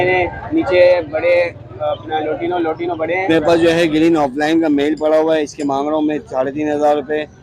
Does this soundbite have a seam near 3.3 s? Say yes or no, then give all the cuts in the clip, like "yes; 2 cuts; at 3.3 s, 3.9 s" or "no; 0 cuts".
yes; 1 cut; at 3.3 s